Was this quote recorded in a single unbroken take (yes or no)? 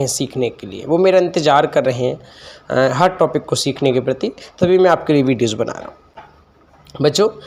yes